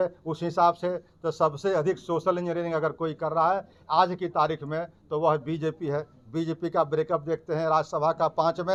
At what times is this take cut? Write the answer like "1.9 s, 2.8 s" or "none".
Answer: none